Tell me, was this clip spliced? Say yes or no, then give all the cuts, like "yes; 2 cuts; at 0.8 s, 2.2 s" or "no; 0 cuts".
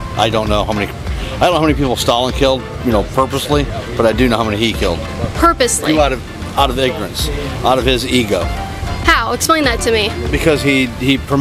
no; 0 cuts